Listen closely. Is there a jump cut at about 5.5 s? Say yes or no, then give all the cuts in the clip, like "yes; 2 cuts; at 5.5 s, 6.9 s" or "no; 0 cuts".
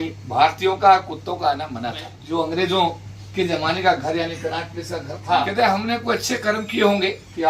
yes; 2 cuts; at 2.1 s, 5.5 s